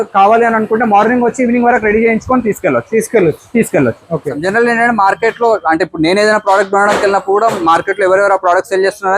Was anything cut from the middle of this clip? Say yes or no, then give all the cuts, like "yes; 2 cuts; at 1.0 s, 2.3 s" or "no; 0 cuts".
yes; 1 cut; at 4.4 s